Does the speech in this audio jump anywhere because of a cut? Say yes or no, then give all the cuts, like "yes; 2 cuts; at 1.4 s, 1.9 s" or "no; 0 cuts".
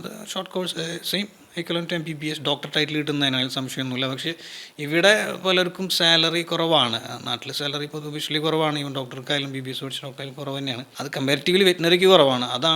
yes; 1 cut; at 10.9 s